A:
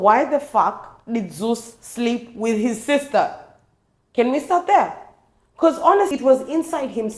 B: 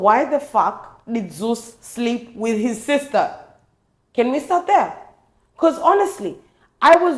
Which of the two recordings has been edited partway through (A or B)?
A